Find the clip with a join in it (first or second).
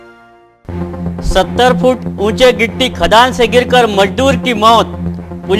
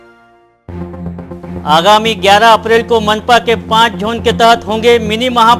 first